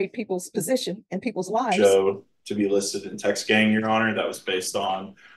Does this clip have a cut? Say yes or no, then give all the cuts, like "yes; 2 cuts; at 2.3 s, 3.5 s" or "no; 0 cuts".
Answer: yes; 1 cut; at 1.6 s